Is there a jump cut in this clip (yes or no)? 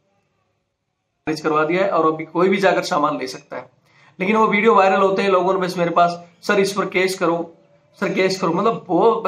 yes